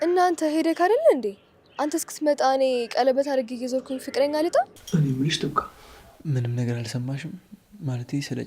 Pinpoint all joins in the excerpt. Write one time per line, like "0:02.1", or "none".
0:04.8